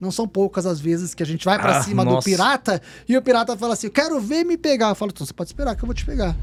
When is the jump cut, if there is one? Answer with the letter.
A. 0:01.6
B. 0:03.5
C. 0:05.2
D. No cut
D